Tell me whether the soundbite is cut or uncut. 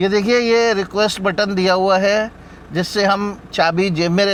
uncut